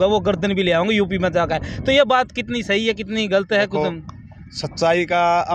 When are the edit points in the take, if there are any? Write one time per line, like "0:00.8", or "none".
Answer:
none